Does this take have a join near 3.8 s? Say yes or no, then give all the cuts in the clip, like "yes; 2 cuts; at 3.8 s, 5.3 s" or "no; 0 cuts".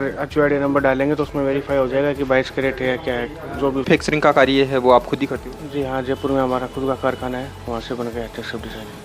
yes; 1 cut; at 3.8 s